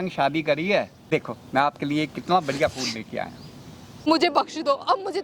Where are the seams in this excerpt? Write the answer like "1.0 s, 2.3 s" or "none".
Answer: 1.1 s, 4.1 s